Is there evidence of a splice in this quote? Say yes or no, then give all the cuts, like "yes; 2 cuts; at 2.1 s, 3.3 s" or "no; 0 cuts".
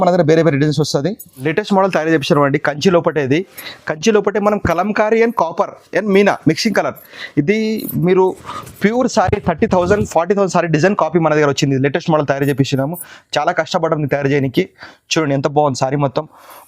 yes; 1 cut; at 1.3 s